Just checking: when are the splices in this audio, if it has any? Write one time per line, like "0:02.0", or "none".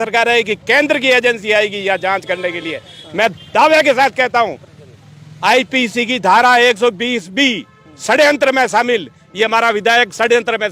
none

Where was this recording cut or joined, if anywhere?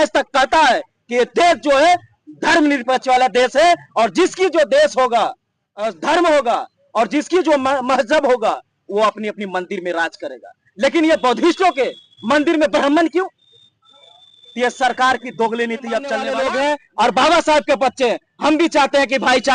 0:16.3

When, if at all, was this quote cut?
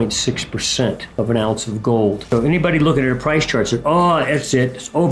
0:01.0
0:02.2

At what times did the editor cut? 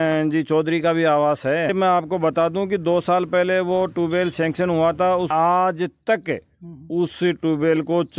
0:01.7
0:05.3

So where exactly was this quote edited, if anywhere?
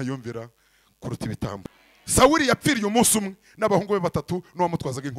0:01.6

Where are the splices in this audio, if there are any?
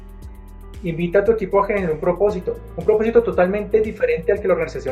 none

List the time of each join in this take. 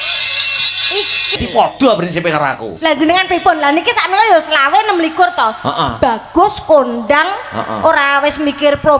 0:01.4

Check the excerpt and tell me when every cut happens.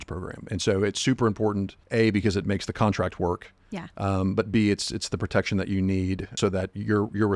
0:01.8
0:06.3

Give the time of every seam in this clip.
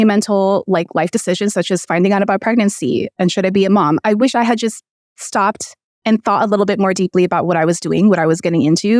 0:04.0

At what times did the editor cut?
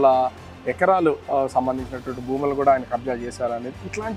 none

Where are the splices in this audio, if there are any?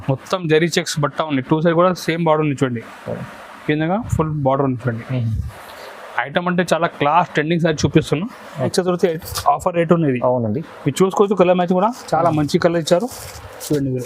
0:08.7

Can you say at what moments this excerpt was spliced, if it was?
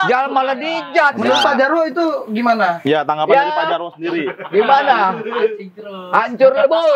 0:01.2

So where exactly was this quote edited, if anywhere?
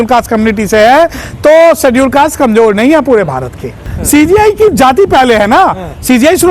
0:03.9

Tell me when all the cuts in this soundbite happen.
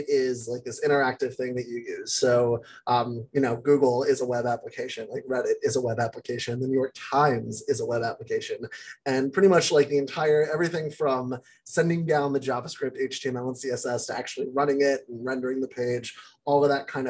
none

